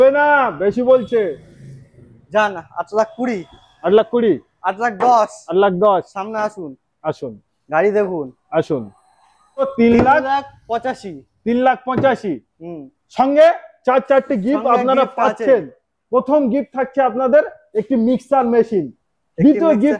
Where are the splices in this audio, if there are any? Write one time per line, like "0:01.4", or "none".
0:09.7